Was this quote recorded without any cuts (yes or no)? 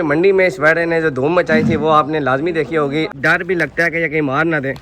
no